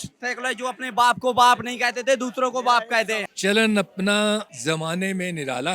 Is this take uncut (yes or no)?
no